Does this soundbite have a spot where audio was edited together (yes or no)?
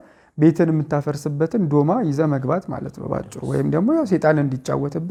no